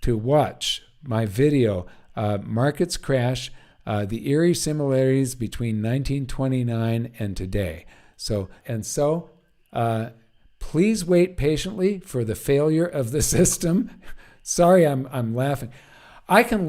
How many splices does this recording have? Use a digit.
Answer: 1